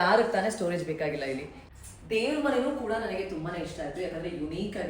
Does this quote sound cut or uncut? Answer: cut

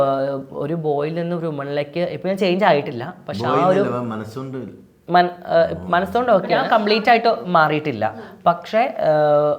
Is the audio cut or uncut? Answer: cut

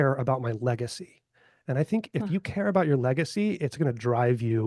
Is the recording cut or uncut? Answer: uncut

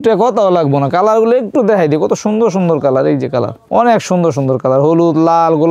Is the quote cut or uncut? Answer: uncut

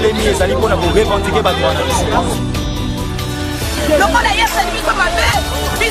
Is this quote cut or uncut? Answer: uncut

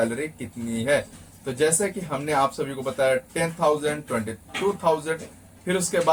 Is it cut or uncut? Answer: uncut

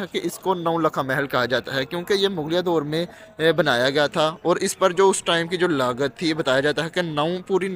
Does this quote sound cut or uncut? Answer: uncut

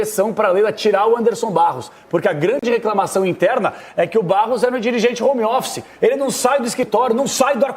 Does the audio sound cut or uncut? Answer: uncut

